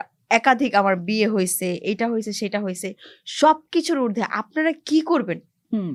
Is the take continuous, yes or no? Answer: yes